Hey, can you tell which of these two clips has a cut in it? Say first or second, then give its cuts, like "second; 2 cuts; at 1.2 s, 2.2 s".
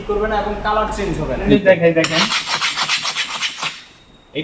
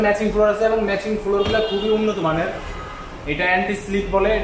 first; 1 cut; at 1.4 s